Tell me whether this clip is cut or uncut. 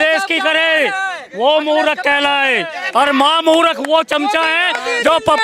uncut